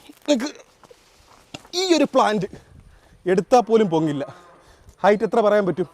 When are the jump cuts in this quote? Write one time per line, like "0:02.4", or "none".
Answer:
none